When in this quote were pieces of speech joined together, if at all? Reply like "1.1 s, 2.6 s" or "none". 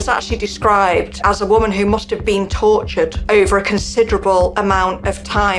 1.2 s